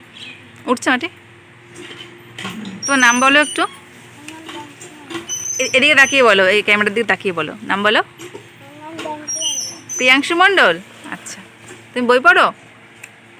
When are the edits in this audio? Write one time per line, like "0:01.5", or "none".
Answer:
none